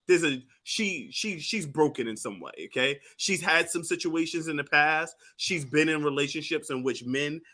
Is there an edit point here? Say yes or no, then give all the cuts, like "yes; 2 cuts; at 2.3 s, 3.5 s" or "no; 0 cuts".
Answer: no; 0 cuts